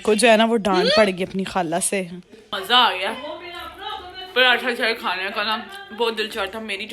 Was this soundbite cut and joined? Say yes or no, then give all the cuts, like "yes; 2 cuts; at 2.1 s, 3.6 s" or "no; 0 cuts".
yes; 1 cut; at 2.5 s